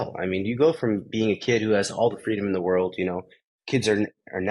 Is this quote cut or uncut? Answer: uncut